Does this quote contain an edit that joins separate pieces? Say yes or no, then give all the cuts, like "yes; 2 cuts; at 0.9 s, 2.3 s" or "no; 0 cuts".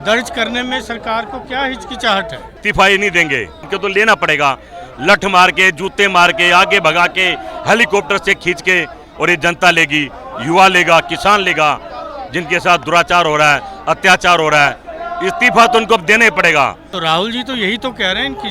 yes; 3 cuts; at 2.6 s, 3.7 s, 16.9 s